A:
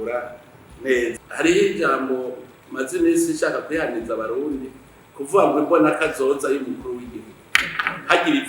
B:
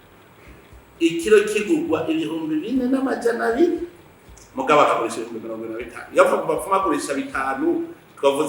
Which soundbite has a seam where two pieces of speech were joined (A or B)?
A